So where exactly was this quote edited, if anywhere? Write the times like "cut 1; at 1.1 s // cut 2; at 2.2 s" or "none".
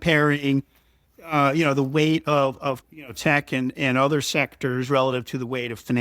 cut 1; at 2.9 s